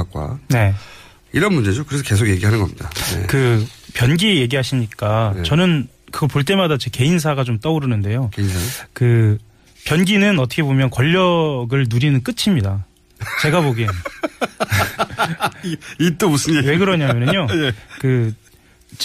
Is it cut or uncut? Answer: cut